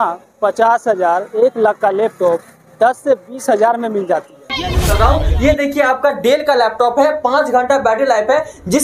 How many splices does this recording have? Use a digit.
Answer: 1